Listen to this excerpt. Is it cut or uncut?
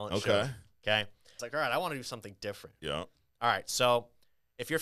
cut